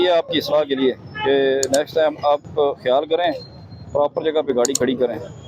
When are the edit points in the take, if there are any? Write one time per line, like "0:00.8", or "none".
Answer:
none